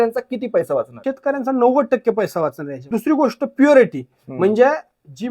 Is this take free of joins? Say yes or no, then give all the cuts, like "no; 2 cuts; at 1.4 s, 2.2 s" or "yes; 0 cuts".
no; 2 cuts; at 1.0 s, 2.9 s